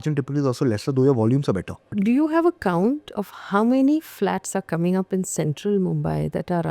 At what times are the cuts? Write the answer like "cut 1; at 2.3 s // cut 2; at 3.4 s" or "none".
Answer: cut 1; at 1.9 s

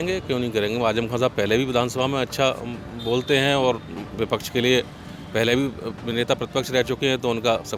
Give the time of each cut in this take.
none

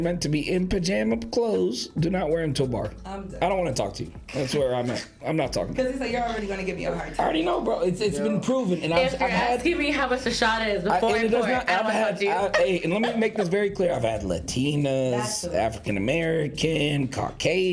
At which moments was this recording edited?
none

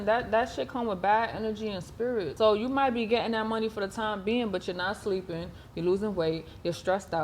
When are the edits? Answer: cut 1; at 2.3 s

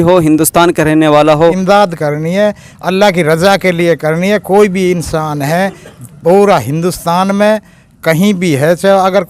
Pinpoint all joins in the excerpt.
cut 1; at 1.6 s

